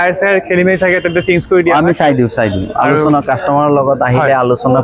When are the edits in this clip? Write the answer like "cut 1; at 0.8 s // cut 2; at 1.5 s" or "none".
none